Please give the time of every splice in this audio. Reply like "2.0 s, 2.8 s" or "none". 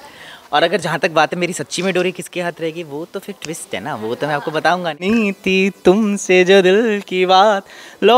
5.0 s